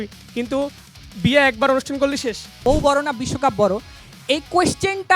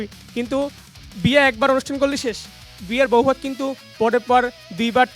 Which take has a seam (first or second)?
first